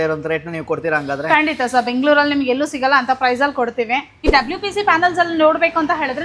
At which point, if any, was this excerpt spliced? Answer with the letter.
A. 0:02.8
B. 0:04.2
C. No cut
B